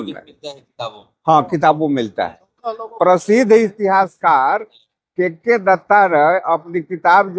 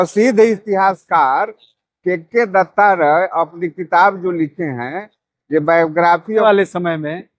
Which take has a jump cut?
second; 1 cut; at 6.4 s

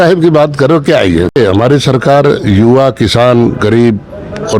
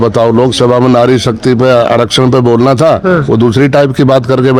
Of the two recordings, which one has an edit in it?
first; 1 cut; at 1.3 s

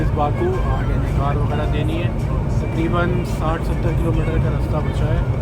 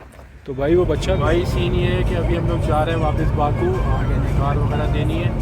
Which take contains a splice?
second; 1 cut; at 1.0 s

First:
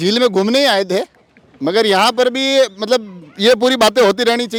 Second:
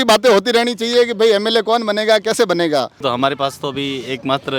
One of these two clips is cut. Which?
second; 1 cut; at 3.0 s

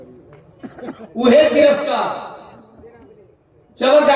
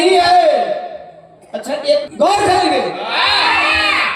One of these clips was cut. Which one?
second; 1 cut; at 2.1 s

